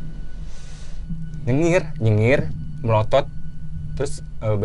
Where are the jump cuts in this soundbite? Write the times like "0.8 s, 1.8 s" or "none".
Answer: 1.5 s